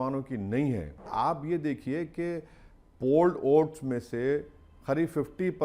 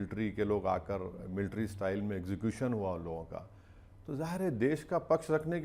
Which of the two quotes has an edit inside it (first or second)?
first